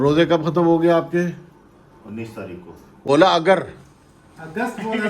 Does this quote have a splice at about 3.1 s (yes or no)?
yes